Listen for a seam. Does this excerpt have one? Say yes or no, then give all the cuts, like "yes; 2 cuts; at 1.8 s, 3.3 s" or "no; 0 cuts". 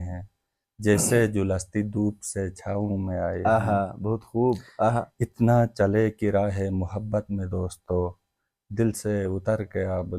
no; 0 cuts